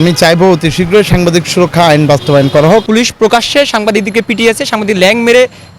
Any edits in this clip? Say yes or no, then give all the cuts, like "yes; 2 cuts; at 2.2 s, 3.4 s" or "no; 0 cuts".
yes; 1 cut; at 2.9 s